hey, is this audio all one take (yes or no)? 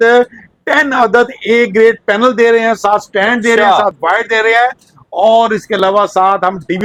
yes